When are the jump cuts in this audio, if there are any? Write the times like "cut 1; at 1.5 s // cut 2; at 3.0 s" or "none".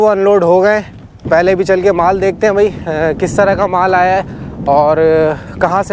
none